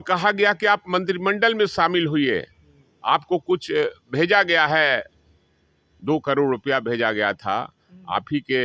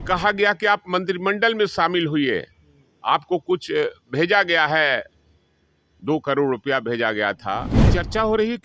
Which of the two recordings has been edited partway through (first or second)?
second